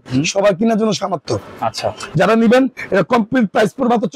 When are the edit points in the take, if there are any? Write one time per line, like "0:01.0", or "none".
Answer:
none